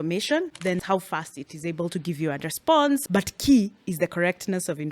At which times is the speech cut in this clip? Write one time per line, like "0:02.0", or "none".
0:00.8
0:03.0